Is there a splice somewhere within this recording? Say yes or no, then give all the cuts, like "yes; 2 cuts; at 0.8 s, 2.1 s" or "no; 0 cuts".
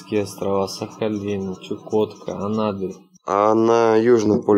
yes; 1 cut; at 3.1 s